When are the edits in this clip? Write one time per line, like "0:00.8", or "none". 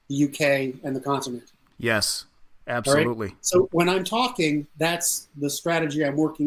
none